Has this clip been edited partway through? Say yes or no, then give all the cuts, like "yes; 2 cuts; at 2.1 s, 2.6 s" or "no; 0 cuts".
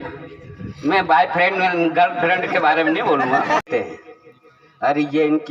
yes; 1 cut; at 3.6 s